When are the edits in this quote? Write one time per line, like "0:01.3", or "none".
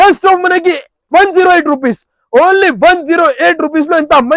none